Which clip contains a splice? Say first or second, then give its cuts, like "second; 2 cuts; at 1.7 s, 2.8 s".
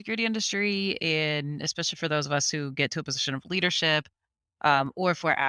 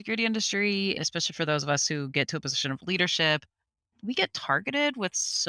second; 2 cuts; at 1.0 s, 3.8 s